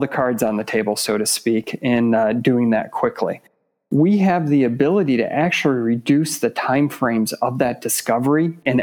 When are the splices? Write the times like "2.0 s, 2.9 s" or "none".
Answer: 3.6 s